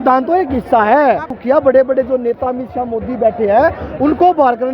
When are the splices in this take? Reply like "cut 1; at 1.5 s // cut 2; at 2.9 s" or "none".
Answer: cut 1; at 1.3 s

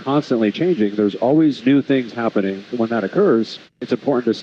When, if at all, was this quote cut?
cut 1; at 2.7 s

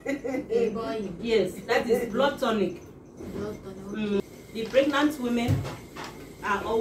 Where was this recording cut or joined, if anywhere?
cut 1; at 4.2 s

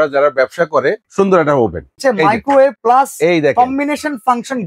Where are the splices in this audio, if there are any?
cut 1; at 1.1 s // cut 2; at 2.0 s // cut 3; at 2.8 s

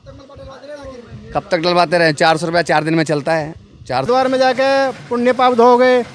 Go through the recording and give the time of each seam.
cut 1; at 4.0 s

